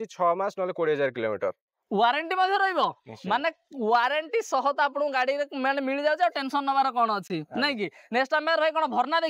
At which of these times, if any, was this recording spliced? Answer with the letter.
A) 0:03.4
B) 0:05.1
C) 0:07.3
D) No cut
D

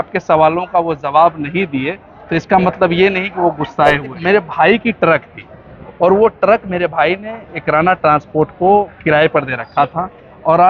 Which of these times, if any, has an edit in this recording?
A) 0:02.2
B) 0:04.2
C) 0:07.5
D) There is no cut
B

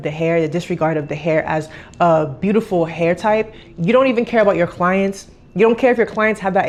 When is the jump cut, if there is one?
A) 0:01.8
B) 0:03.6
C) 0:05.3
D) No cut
D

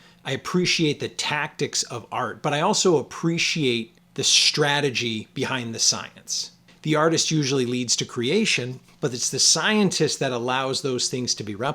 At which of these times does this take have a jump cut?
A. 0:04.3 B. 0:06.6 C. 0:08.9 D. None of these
B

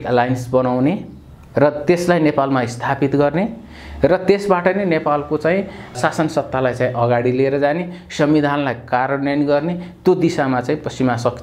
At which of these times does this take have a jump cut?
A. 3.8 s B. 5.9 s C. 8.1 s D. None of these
B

